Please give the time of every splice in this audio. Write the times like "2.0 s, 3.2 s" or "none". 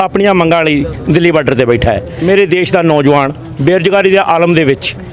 2.1 s